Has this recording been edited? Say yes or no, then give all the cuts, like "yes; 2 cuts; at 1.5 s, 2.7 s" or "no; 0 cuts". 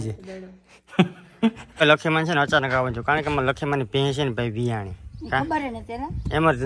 yes; 1 cut; at 1.6 s